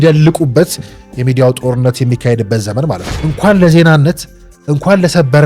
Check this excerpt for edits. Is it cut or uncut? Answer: cut